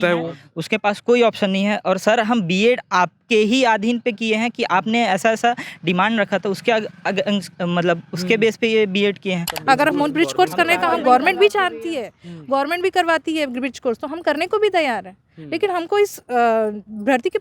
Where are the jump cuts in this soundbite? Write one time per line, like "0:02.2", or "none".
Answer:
0:09.5